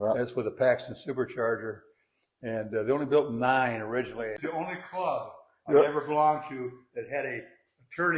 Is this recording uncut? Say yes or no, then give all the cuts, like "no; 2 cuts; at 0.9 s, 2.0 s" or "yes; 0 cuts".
no; 1 cut; at 4.4 s